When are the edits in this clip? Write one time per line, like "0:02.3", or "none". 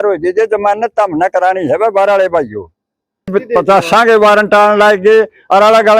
0:03.3